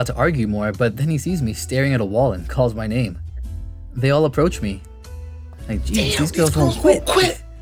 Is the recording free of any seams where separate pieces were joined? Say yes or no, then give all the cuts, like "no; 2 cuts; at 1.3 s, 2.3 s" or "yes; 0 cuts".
yes; 0 cuts